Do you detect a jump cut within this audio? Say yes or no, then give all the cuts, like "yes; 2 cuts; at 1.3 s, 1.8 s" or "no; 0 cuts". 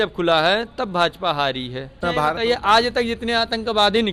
yes; 1 cut; at 2.0 s